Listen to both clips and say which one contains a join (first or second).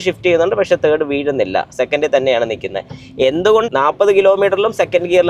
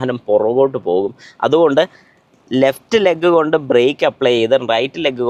first